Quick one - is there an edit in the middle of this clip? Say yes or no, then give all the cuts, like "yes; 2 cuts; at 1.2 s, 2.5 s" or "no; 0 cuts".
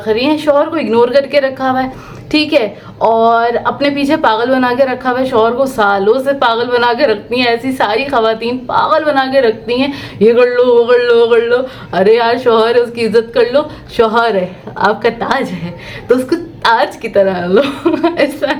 no; 0 cuts